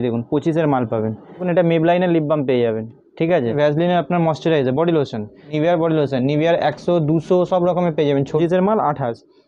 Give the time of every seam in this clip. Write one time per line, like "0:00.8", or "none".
0:01.5
0:03.5
0:05.4
0:08.4